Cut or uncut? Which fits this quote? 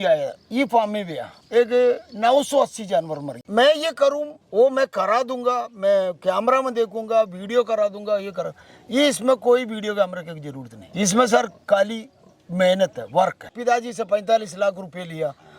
cut